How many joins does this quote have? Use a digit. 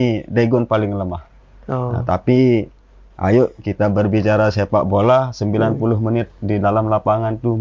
0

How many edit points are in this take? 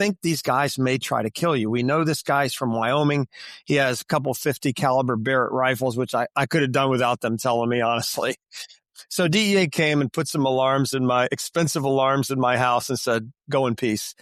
0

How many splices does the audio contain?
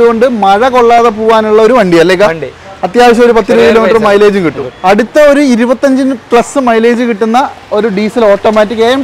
1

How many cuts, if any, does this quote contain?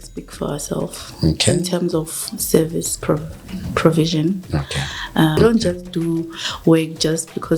1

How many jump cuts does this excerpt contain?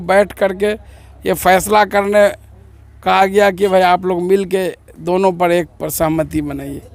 0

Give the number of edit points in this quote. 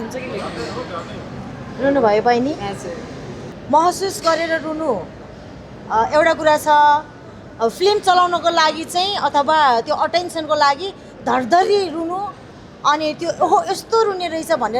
1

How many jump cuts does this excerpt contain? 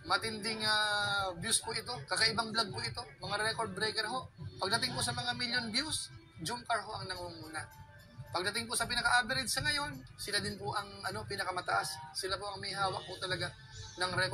0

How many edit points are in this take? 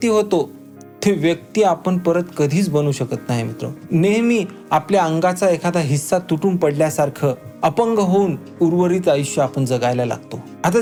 0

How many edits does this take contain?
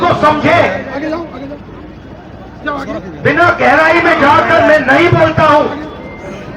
0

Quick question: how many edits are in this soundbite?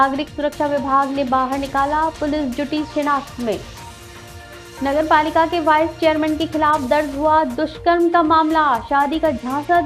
0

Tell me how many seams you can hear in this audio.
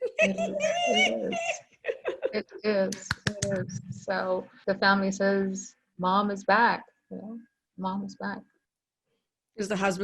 1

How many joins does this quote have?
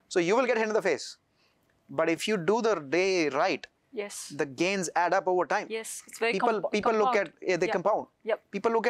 1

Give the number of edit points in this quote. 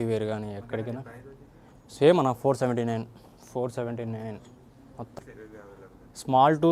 1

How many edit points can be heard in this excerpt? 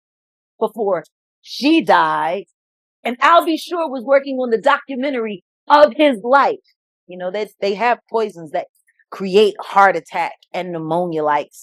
1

